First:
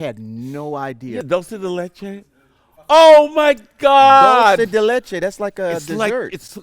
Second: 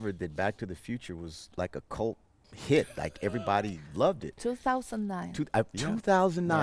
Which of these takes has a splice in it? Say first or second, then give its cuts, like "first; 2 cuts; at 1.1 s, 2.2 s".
first; 1 cut; at 1.2 s